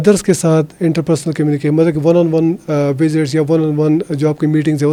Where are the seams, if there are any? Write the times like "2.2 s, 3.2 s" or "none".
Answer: none